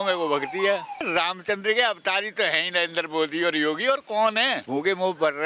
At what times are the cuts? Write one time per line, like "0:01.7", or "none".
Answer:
0:01.0
0:04.6

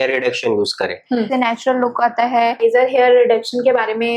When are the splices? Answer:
0:01.3
0:02.6

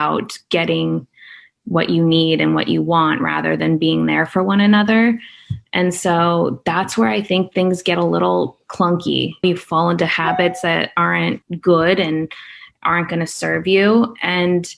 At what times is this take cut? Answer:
none

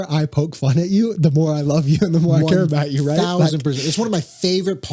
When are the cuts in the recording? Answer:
none

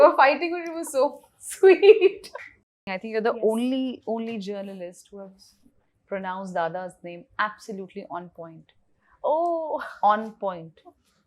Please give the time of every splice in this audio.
0:02.8

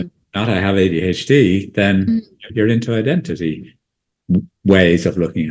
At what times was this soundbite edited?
0:02.5

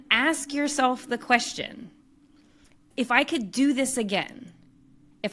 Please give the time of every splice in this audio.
0:02.8

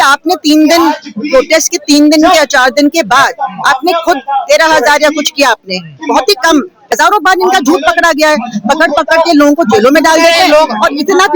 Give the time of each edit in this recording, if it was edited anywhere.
0:06.8

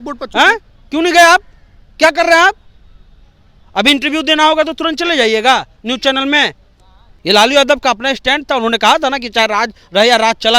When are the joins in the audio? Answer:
0:07.1

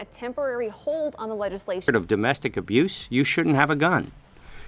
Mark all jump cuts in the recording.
0:01.8

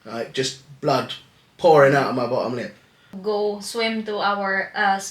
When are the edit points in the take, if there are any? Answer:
0:03.1

